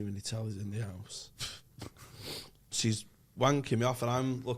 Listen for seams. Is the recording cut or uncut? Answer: cut